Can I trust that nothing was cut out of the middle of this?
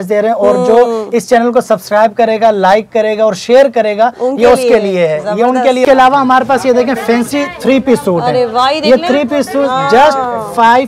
no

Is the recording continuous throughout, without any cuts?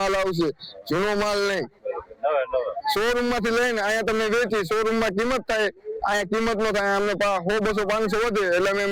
yes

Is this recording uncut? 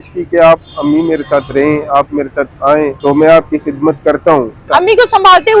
no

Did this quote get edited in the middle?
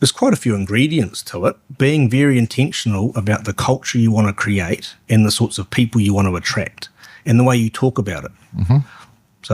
yes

